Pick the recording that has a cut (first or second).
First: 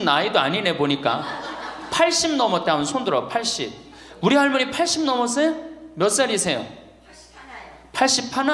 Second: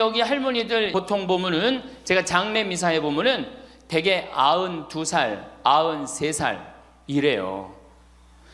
second